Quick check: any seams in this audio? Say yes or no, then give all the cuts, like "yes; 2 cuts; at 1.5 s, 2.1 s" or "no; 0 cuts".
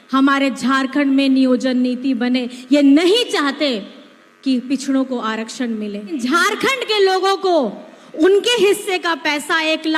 yes; 1 cut; at 6.2 s